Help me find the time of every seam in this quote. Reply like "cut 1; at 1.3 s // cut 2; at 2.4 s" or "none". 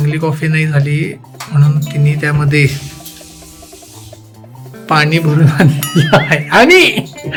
none